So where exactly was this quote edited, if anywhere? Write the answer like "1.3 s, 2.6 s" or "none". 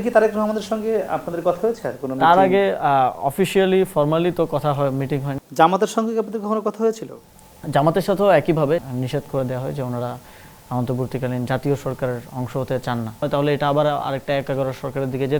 5.4 s, 8.8 s, 13.2 s